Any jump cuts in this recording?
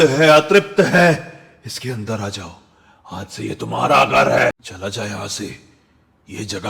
yes; 1 cut; at 4.6 s

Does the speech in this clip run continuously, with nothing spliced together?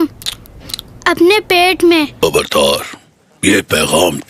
no; 1 cut; at 2.1 s

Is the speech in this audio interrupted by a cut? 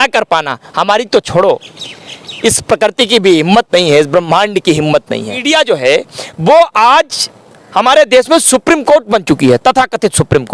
yes; 1 cut; at 5.4 s

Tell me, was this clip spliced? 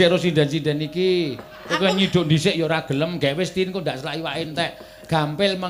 no; 0 cuts

